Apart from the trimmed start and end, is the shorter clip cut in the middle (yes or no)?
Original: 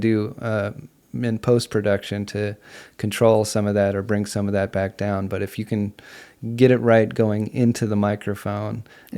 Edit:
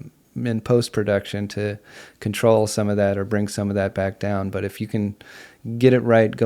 no